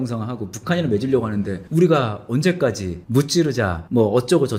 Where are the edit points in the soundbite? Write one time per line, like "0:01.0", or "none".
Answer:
none